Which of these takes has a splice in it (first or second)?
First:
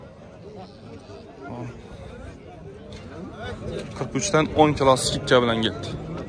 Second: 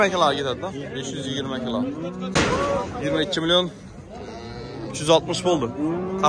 second